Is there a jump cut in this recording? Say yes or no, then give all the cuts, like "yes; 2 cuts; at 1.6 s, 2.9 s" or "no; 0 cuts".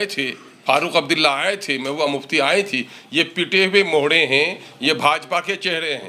no; 0 cuts